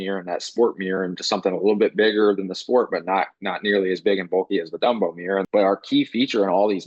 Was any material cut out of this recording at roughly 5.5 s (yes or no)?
yes